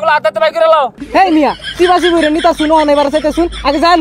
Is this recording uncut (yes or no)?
no